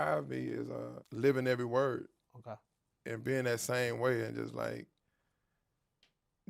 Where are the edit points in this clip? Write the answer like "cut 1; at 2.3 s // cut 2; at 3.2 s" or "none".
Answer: cut 1; at 1.0 s